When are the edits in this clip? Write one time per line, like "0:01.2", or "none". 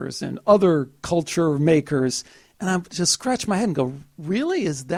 none